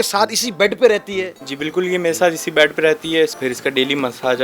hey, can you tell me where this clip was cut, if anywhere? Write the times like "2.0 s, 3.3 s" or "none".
3.4 s

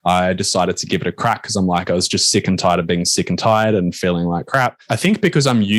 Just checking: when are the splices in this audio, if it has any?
4.8 s

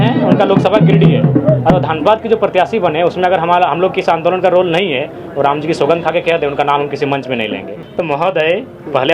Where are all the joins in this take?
7.8 s

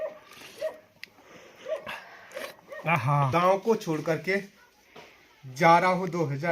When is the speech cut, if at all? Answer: 3.3 s

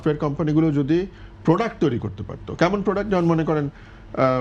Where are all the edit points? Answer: none

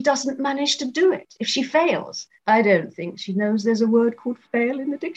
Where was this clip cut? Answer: 2.4 s

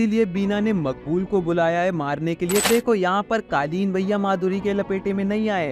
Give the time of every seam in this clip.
2.7 s

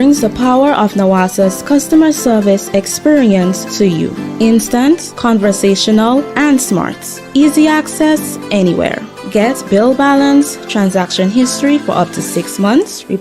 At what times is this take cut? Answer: none

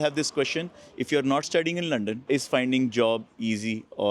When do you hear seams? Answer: 2.2 s

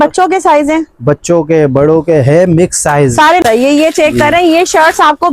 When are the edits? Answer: 3.4 s

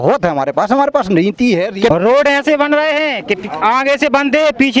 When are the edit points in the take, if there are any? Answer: 1.9 s

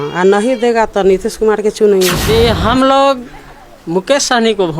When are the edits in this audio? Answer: 2.2 s

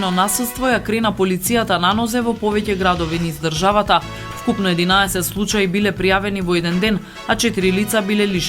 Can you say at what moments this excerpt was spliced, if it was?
none

